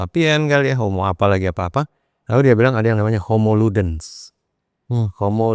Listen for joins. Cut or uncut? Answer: uncut